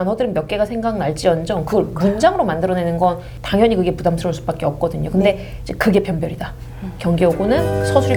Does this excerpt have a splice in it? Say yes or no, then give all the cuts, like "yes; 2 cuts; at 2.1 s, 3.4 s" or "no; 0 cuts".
no; 0 cuts